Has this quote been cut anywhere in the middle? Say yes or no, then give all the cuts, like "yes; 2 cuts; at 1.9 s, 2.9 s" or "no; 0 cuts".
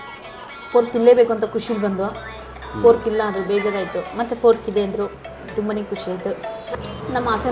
no; 0 cuts